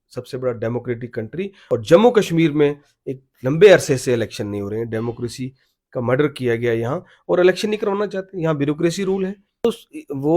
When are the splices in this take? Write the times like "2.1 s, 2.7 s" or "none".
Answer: 1.6 s, 9.6 s